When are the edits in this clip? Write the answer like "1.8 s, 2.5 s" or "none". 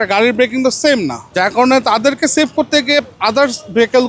1.2 s